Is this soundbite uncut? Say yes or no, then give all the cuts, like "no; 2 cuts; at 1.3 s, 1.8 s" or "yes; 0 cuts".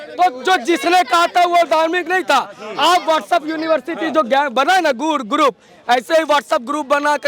yes; 0 cuts